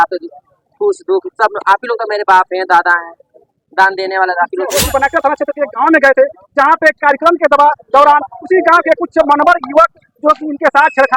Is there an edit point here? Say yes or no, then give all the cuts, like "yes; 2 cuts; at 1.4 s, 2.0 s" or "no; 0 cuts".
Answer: yes; 1 cut; at 4.9 s